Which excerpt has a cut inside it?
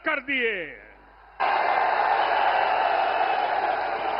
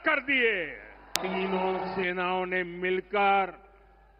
second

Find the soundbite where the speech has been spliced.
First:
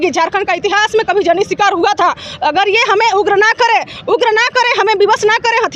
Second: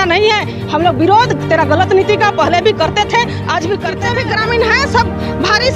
second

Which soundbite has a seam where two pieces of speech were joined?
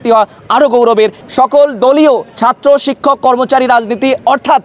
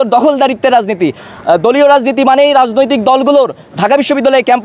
first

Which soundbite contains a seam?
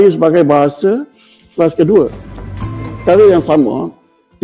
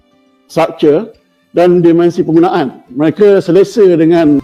first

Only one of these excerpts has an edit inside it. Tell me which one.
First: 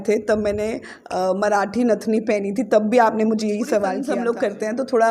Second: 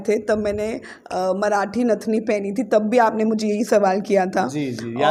first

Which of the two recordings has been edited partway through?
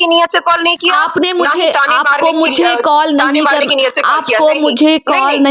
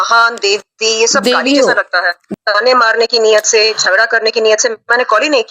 second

